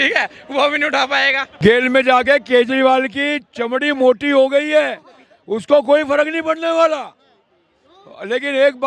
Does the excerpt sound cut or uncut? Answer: cut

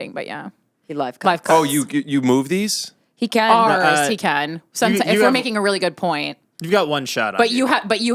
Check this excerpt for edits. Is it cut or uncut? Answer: uncut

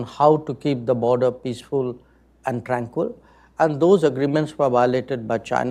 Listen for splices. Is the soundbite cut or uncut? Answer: uncut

